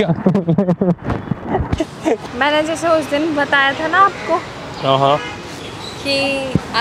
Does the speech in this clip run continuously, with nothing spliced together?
no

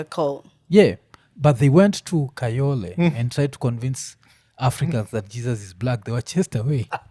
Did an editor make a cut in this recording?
no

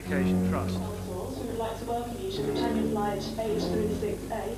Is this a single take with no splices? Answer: yes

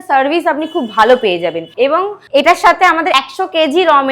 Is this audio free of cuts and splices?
no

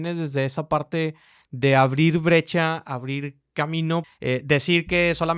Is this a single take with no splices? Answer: no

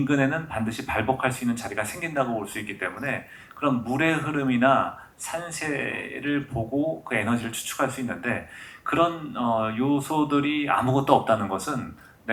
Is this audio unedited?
yes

